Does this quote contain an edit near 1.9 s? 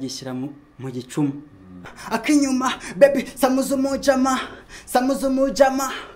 yes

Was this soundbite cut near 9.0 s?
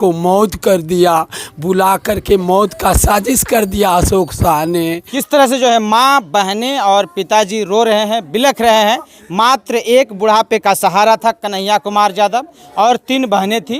no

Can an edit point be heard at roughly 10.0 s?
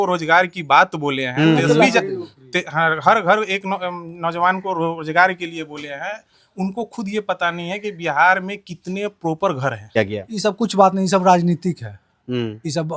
yes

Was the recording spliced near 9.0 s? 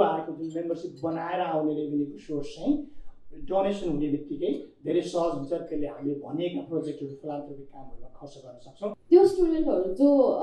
yes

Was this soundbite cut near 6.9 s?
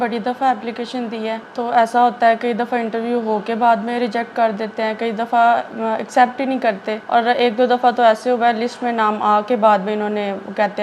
yes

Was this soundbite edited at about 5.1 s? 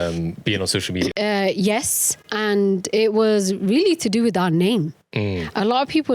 no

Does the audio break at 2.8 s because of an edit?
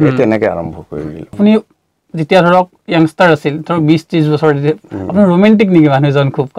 no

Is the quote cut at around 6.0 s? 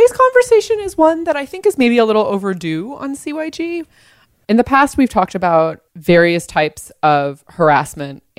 no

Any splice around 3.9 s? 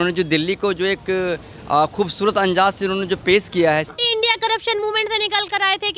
yes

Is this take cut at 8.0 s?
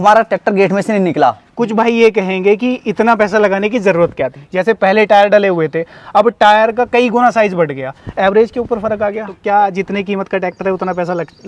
no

